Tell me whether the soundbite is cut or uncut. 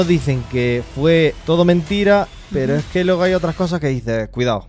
cut